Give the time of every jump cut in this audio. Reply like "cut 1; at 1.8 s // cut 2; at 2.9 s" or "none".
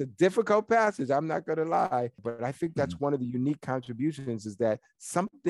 cut 1; at 2.2 s